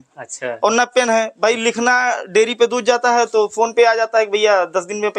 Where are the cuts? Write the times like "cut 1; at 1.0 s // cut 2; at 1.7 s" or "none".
none